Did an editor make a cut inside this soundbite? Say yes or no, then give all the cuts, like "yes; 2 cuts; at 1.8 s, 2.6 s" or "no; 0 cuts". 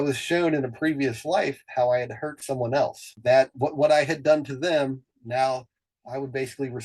no; 0 cuts